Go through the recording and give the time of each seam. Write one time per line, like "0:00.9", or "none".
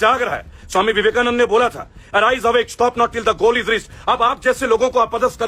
none